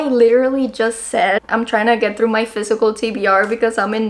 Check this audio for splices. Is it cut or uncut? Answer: cut